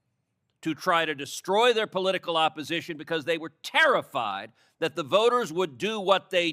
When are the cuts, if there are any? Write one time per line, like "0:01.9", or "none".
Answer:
none